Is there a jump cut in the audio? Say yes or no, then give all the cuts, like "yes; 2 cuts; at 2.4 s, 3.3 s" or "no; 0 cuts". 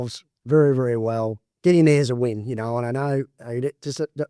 yes; 1 cut; at 1.4 s